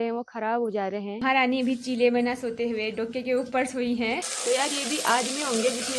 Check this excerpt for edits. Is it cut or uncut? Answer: cut